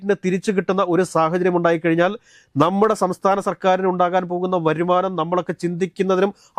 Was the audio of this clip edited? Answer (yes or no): no